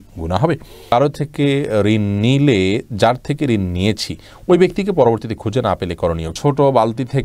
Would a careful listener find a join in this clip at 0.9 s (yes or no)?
yes